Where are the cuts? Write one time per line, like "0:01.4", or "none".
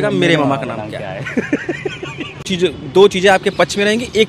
0:02.5